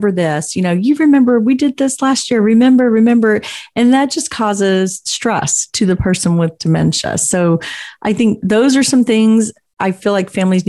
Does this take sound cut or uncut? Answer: uncut